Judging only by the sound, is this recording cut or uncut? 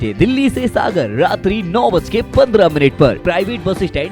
cut